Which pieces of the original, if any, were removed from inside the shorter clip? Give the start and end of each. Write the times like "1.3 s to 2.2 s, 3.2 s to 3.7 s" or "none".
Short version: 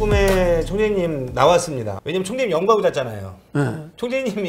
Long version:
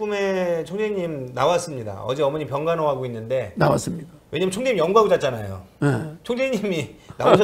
1.9 s to 4.1 s